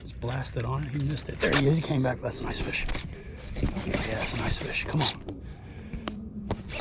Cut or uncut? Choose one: uncut